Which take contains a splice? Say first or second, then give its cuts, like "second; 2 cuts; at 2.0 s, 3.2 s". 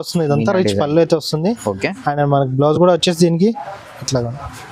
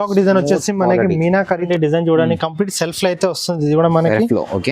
second; 1 cut; at 1.7 s